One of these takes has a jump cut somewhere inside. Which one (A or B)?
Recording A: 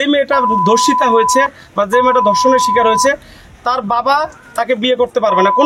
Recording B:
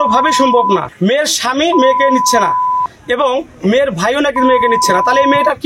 B